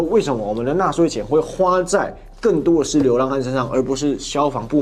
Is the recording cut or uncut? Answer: uncut